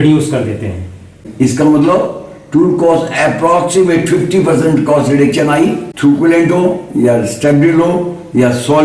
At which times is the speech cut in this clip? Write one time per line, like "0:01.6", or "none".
0:01.2
0:05.9